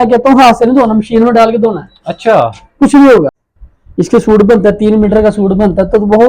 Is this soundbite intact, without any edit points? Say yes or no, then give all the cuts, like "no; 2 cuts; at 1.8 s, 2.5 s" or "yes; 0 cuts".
no; 1 cut; at 3.3 s